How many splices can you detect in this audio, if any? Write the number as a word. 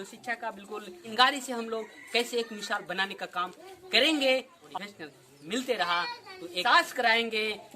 three